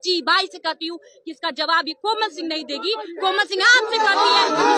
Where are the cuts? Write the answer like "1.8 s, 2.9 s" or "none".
none